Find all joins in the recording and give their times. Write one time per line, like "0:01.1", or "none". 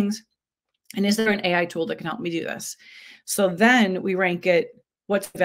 none